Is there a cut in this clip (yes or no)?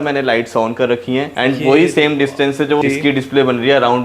yes